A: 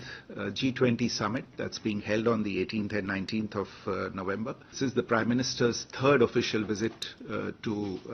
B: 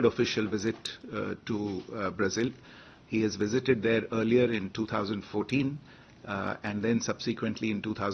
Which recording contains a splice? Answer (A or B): A